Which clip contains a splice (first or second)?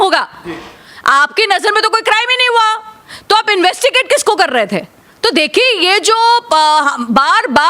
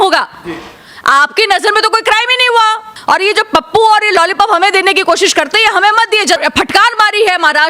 second